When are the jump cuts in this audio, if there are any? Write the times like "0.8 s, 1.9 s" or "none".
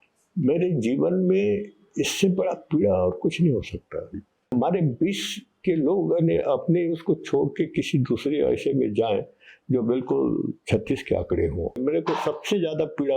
4.5 s, 11.8 s